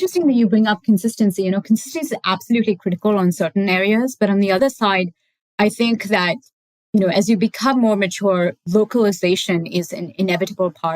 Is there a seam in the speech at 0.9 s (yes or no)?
no